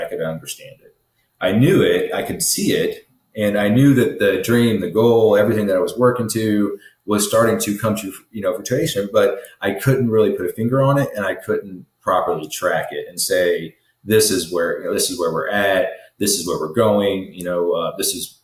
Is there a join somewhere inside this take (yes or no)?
no